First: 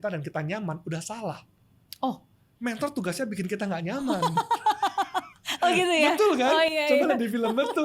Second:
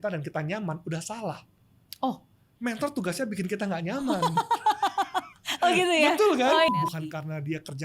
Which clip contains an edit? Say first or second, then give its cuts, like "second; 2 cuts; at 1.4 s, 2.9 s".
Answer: second; 1 cut; at 6.7 s